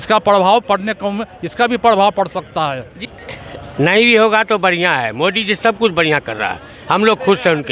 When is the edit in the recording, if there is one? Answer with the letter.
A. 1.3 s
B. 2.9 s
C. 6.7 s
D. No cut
B